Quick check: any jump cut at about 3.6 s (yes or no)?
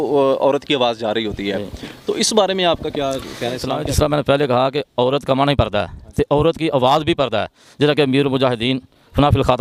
no